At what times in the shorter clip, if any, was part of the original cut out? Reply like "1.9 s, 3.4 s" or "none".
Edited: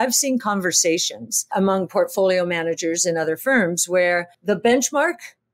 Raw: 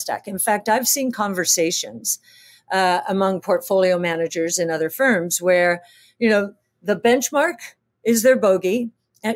1.5 s, 4.3 s